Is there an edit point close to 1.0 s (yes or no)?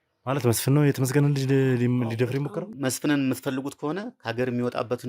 no